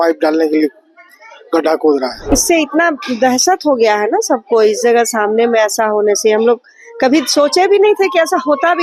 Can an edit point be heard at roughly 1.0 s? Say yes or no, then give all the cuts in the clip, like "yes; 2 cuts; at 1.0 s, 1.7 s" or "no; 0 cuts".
no; 1 cut; at 2.3 s